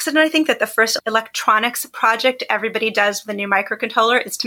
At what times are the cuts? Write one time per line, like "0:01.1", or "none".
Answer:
0:00.9